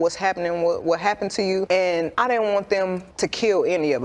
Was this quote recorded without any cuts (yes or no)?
no